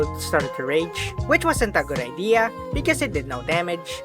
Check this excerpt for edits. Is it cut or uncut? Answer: uncut